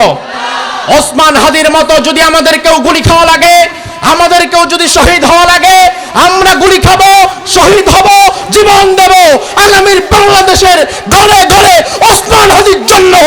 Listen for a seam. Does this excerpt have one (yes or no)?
no